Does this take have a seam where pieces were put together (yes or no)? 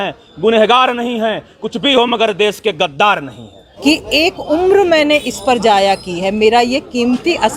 yes